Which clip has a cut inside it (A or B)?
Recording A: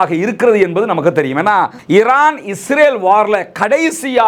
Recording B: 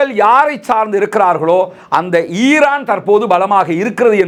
A